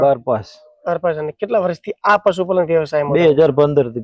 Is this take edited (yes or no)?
no